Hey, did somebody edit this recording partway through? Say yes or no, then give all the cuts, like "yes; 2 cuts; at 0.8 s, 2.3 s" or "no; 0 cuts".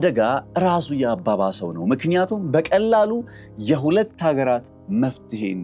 no; 0 cuts